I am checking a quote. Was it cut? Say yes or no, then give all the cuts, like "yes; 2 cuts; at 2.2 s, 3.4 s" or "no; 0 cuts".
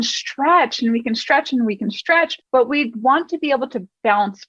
yes; 1 cut; at 2.4 s